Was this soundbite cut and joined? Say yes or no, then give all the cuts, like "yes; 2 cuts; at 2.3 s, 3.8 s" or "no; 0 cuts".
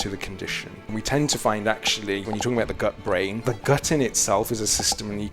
yes; 3 cuts; at 0.9 s, 2.3 s, 3.4 s